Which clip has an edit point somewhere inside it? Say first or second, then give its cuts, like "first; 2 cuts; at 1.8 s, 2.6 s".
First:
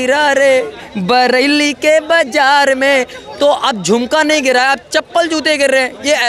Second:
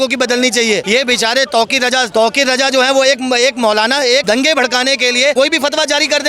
second; 4 cuts; at 0.8 s, 2.1 s, 4.2 s, 5.3 s